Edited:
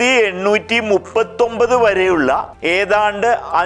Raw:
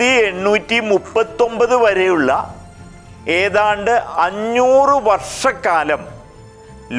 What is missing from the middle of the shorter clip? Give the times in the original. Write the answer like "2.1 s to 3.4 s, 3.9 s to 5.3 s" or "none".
2.5 s to 3.2 s